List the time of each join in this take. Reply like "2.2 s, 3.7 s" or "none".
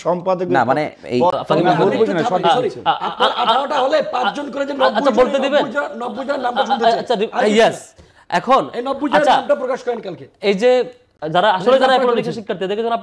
1.3 s, 11.1 s